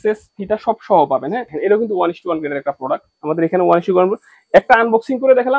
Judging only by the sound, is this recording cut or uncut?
cut